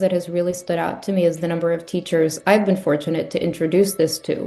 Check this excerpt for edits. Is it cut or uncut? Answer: uncut